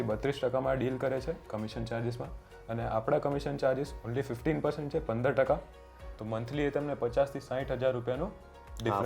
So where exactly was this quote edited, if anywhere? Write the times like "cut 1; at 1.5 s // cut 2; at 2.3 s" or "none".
cut 1; at 5.9 s